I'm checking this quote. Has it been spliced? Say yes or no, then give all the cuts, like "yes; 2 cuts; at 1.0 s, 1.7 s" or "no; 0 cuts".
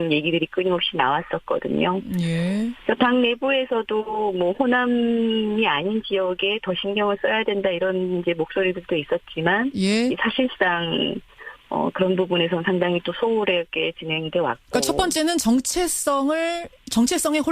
yes; 1 cut; at 7.2 s